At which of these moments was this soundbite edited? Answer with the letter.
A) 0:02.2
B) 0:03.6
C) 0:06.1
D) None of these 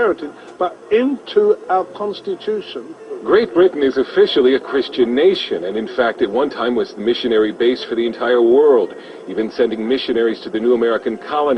C